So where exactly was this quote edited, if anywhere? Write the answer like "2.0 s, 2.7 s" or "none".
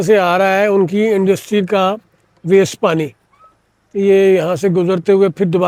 none